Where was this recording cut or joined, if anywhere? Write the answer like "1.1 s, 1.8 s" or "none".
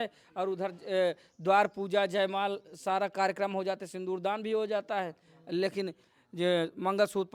none